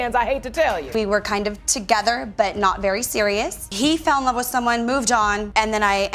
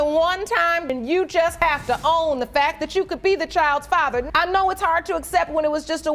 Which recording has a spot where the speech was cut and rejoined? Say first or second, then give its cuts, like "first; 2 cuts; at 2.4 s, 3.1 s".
first; 1 cut; at 0.9 s